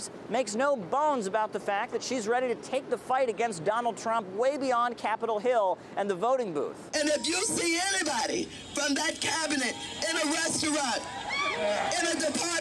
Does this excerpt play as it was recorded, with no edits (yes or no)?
no